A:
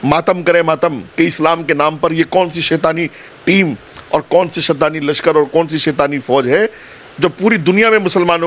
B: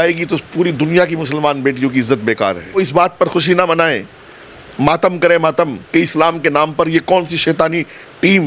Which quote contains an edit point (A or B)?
B